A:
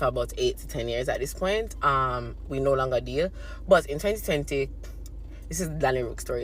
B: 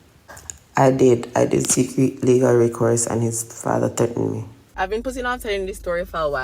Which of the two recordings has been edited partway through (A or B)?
B